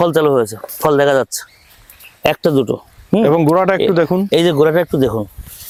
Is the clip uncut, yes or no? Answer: yes